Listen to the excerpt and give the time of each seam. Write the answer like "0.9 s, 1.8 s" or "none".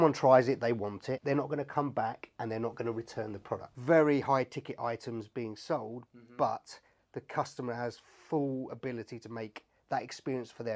1.2 s, 3.7 s